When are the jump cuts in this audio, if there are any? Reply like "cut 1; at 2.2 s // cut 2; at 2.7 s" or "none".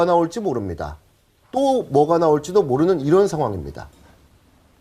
cut 1; at 3.2 s